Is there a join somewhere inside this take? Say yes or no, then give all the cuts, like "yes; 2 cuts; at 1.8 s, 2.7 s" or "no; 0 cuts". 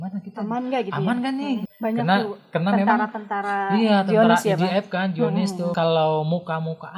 yes; 2 cuts; at 1.7 s, 5.7 s